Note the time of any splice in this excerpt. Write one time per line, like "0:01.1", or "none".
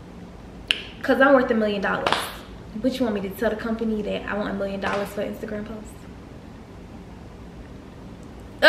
none